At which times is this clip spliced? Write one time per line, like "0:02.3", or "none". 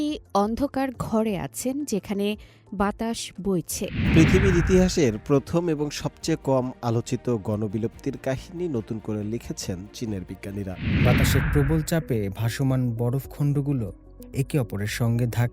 0:04.0
0:10.9